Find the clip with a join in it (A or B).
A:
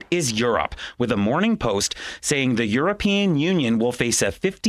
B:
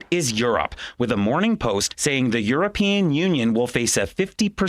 B